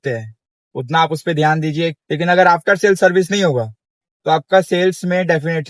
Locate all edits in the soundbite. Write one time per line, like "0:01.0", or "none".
0:02.0